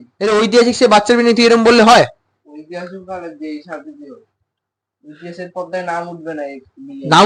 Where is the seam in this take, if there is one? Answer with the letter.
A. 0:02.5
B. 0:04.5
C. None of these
C